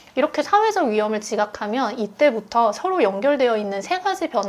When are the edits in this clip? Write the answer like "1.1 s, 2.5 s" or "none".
none